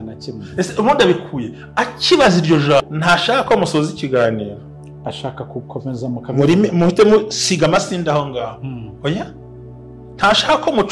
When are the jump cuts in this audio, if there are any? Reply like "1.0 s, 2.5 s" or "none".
2.8 s